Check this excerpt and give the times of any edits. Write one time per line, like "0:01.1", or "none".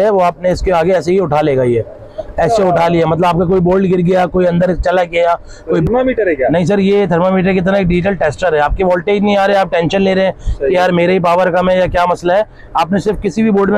0:05.9